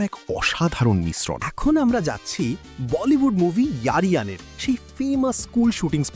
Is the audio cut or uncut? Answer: cut